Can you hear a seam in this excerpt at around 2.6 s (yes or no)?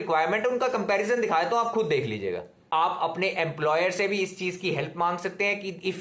yes